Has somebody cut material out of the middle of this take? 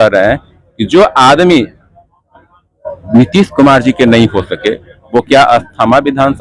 no; 0 cuts

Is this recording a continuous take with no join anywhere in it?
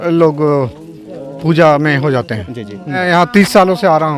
no; 1 cut; at 3.0 s

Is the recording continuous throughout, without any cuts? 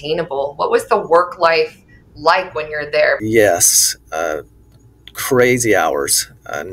no; 1 cut; at 3.2 s

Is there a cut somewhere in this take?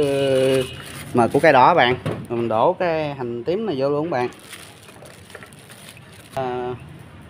yes; 2 cuts; at 2.2 s, 6.4 s

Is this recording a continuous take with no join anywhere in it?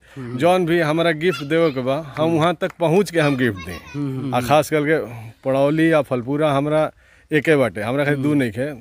no; 1 cut; at 4.2 s

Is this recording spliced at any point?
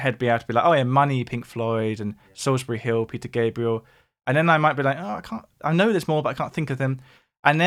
no; 0 cuts

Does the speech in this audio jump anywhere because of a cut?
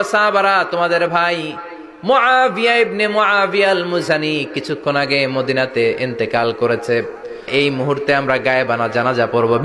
yes; 1 cut; at 7.5 s

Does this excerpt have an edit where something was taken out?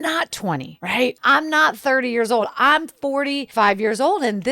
yes; 2 cuts; at 1.2 s, 3.4 s

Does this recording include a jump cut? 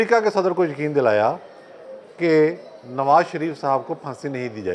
no; 0 cuts

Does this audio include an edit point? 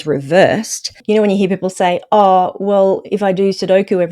yes; 1 cut; at 0.9 s

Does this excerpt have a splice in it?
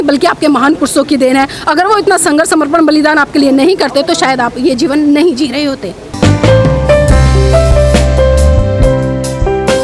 no; 0 cuts

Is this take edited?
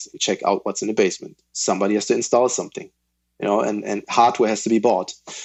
no; 0 cuts

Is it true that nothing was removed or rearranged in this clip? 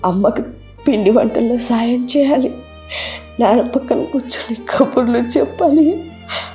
yes; 0 cuts

